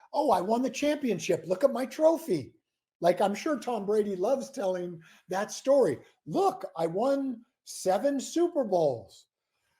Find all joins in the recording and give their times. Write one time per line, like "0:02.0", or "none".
none